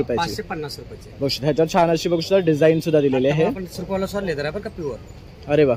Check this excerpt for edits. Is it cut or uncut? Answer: cut